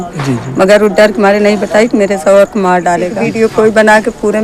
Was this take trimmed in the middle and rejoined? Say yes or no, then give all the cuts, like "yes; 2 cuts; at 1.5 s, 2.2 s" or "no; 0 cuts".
yes; 1 cut; at 3.1 s